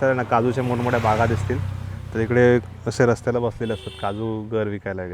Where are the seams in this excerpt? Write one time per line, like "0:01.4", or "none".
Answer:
none